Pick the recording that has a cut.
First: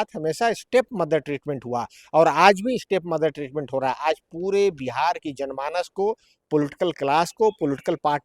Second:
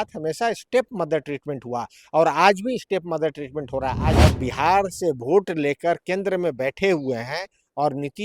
second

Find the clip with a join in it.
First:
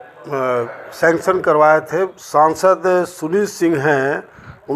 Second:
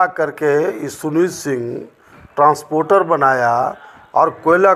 first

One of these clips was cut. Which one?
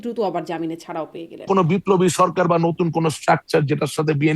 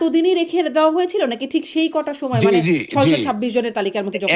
first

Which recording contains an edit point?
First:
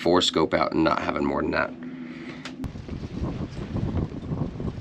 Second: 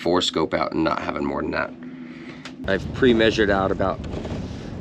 second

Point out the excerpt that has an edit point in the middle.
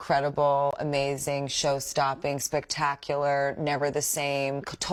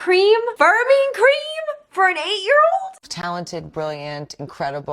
second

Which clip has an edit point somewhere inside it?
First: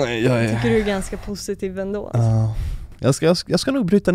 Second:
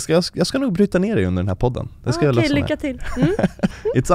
second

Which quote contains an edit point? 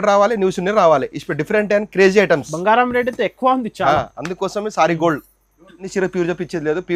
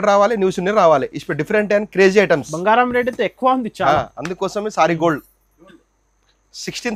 first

